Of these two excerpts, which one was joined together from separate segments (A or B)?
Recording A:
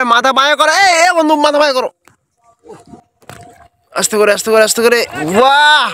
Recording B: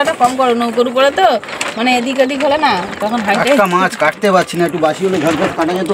A